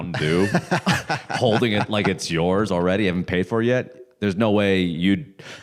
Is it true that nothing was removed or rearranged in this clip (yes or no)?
yes